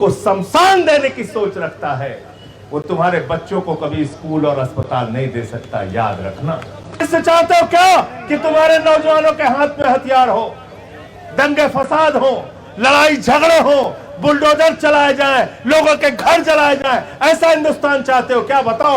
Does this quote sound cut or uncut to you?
cut